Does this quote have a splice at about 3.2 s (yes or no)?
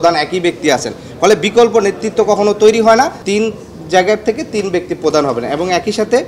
yes